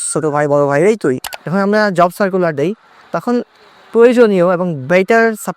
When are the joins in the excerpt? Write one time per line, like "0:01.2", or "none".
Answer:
0:01.3

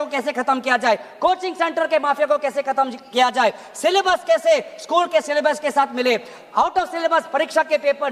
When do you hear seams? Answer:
none

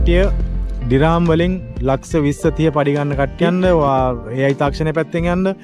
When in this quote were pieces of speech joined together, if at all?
0:03.5

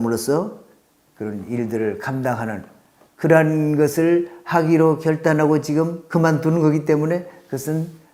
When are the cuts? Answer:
none

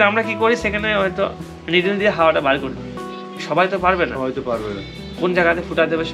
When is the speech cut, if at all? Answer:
none

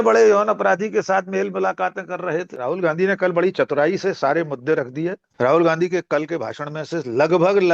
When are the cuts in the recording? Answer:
0:02.5
0:05.2

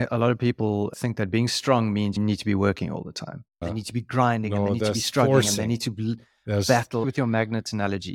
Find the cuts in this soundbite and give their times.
0:02.2
0:03.6
0:07.1

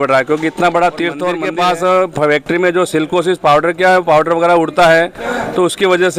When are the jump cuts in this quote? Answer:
0:01.4

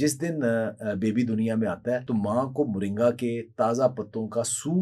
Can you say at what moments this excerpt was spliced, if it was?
0:02.0

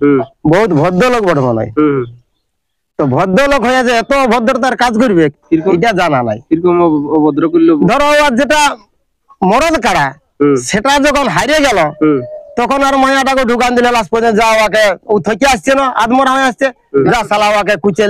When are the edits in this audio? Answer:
none

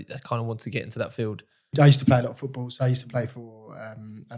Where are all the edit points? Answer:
0:01.7

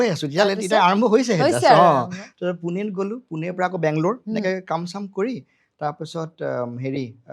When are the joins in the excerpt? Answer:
none

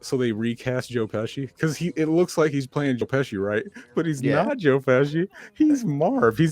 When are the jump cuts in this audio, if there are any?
0:04.5

